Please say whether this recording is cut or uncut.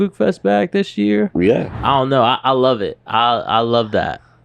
cut